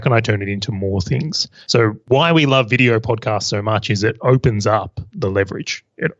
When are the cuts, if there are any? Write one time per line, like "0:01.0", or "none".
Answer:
0:01.8